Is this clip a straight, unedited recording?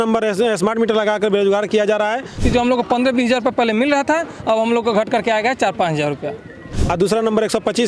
no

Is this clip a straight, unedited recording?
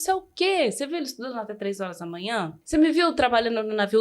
no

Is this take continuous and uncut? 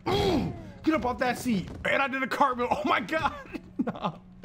yes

